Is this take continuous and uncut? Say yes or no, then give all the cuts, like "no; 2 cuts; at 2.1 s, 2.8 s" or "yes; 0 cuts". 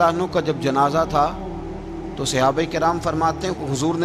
yes; 0 cuts